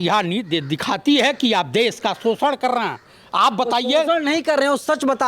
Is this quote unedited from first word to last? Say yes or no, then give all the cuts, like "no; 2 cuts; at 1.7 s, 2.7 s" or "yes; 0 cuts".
yes; 0 cuts